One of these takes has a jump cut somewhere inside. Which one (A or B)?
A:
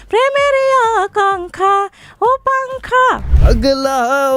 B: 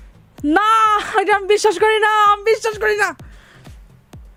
A